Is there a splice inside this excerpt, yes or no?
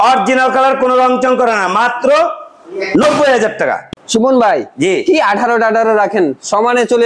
yes